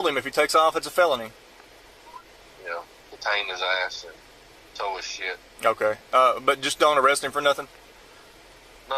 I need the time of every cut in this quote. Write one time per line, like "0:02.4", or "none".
0:02.2